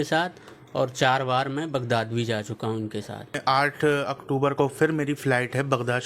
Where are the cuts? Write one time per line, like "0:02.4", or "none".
0:03.4